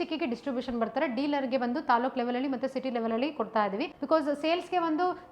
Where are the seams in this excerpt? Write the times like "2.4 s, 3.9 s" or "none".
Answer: 3.9 s